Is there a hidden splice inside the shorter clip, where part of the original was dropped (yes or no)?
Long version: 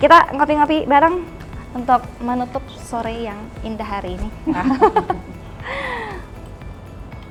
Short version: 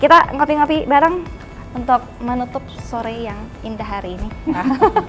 no